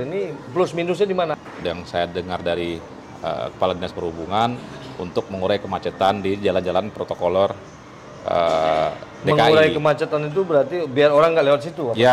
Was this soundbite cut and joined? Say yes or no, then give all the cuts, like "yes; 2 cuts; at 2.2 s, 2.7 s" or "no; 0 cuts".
yes; 1 cut; at 1.3 s